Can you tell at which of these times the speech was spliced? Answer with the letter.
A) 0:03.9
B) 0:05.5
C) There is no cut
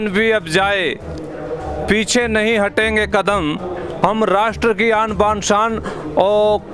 A